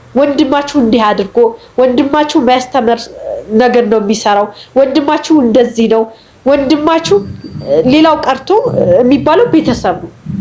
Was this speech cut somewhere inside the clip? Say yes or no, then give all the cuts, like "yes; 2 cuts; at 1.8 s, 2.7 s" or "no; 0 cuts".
no; 0 cuts